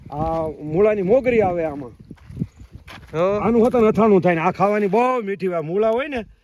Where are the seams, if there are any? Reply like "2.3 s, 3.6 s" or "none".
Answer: none